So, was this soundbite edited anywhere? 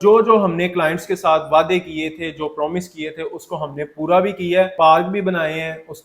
yes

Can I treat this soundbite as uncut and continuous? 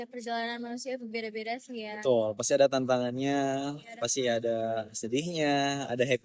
yes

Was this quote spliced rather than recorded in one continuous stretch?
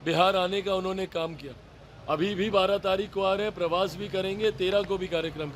no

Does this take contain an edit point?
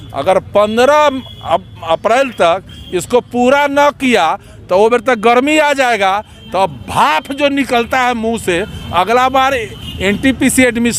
no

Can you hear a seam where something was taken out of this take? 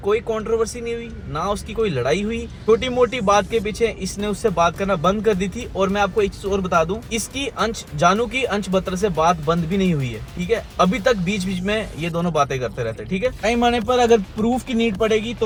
no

